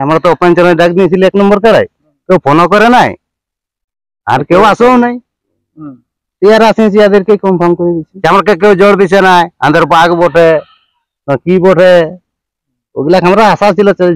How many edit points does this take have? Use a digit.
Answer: 1